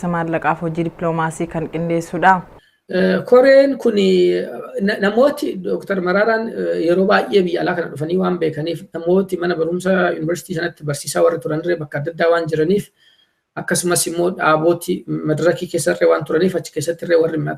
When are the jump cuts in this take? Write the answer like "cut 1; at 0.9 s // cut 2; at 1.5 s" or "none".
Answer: none